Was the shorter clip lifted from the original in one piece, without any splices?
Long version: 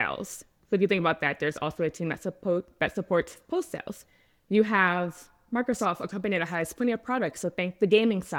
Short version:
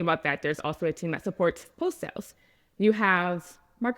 no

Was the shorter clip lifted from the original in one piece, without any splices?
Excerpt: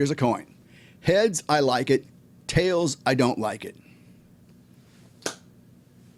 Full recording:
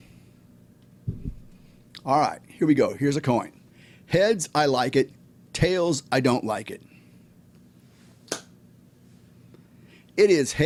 yes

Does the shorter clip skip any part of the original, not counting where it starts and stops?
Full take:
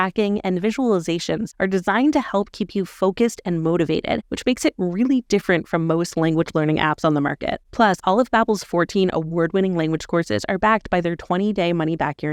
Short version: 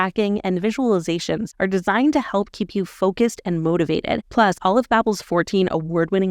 yes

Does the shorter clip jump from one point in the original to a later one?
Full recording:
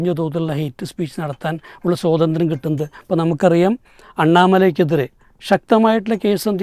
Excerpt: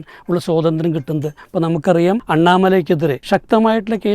yes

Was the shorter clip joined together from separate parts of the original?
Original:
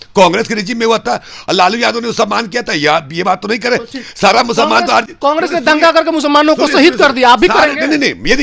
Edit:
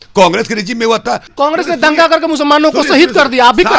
yes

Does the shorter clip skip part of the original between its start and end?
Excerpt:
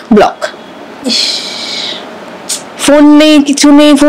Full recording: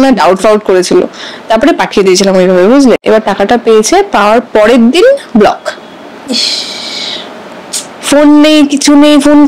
no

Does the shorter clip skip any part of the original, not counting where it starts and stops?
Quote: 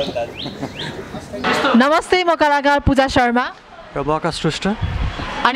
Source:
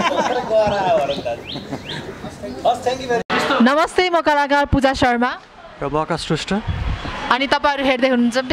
yes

